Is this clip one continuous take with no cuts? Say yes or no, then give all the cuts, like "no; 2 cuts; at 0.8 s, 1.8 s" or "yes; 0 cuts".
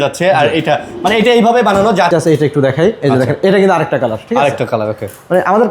no; 1 cut; at 2.1 s